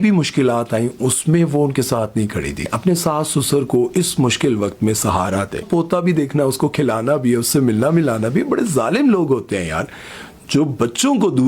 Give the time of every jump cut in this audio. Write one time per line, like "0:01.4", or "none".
0:02.7
0:05.7